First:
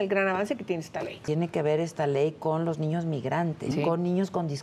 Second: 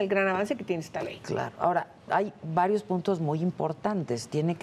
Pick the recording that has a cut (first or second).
first